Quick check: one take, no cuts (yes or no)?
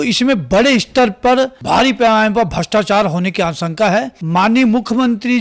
no